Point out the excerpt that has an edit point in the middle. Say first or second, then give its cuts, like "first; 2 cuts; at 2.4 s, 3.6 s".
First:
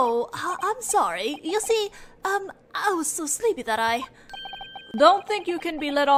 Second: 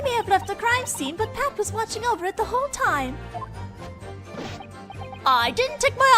second; 1 cut; at 3.2 s